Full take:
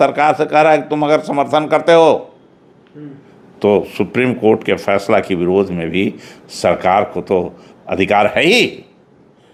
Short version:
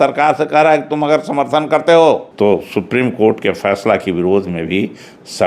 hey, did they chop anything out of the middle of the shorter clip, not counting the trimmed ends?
yes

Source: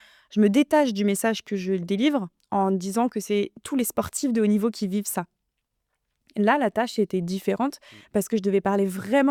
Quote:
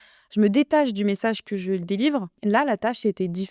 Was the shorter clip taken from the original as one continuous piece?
no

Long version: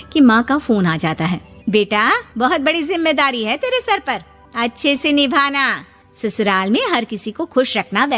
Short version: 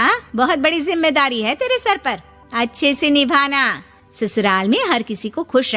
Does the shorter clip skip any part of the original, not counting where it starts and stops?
no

